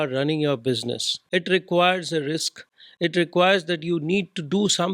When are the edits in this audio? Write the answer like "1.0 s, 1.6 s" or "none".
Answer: 1.1 s